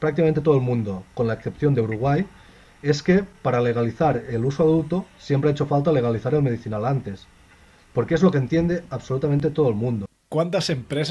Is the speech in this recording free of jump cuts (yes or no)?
no